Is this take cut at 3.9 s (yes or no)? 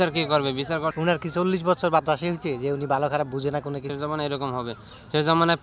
yes